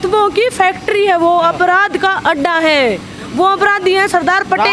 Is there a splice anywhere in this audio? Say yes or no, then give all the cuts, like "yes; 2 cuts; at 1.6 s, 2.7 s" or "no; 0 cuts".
no; 0 cuts